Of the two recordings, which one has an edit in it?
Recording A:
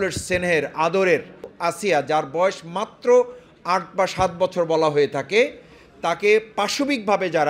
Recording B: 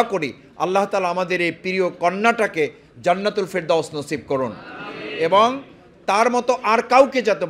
A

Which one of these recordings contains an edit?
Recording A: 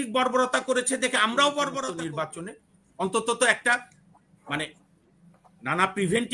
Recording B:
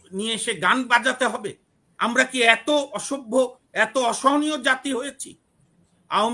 A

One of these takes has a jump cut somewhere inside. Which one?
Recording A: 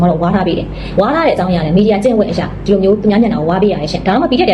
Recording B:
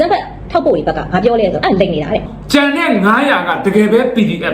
B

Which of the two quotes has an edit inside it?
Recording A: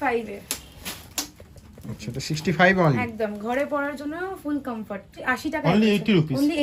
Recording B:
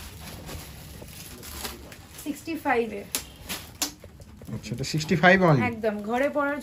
A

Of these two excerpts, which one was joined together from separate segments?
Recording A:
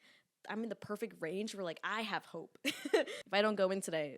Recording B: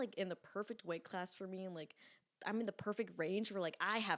A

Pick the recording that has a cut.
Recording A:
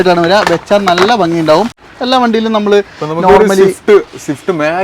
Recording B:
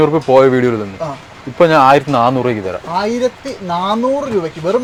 A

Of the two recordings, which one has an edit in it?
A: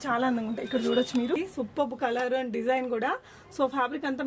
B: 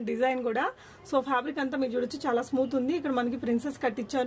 A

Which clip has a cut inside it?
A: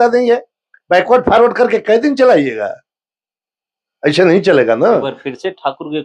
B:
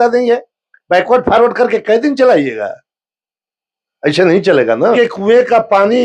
B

